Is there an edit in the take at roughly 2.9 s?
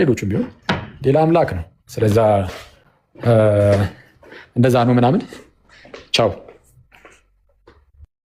no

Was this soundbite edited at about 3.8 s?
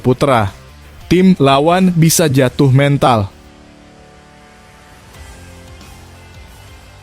yes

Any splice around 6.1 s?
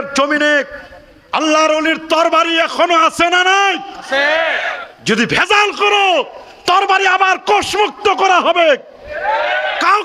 no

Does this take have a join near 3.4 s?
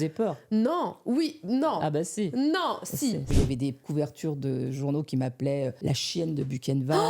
yes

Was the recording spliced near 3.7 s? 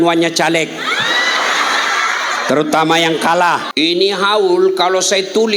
yes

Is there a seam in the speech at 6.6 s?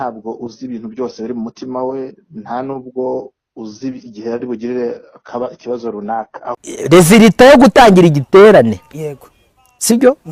yes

